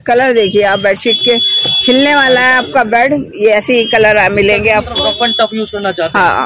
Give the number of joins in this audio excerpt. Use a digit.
1